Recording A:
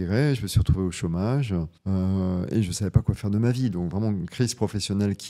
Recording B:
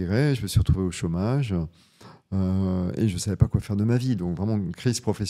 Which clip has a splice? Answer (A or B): A